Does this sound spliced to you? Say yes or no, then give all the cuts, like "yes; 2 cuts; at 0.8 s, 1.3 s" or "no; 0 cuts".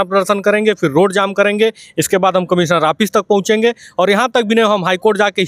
no; 0 cuts